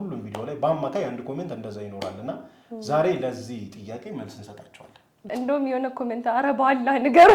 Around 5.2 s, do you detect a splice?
yes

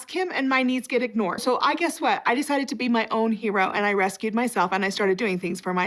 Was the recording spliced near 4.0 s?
no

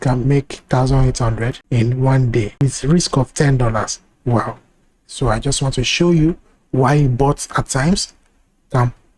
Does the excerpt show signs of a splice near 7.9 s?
no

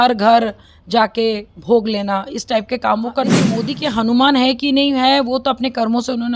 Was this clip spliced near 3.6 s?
yes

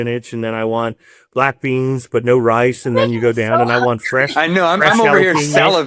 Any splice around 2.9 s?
no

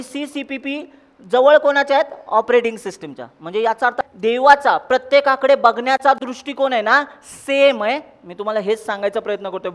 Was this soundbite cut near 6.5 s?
no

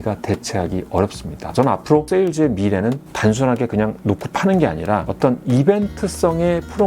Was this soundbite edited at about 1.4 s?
yes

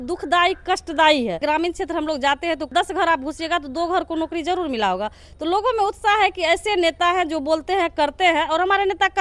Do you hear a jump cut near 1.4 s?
yes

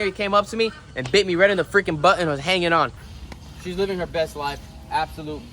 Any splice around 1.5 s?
no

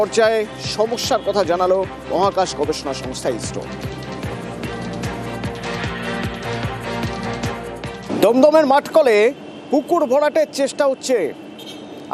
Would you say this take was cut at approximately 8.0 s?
yes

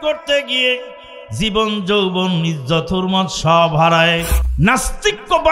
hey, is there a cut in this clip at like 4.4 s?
yes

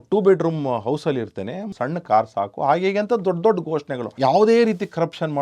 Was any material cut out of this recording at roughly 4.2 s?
yes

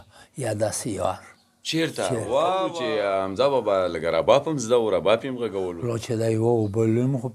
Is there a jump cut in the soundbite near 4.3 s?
no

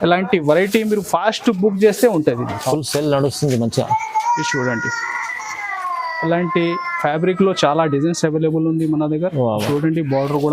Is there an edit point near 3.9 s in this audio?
no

